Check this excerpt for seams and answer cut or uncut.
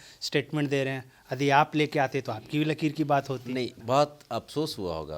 cut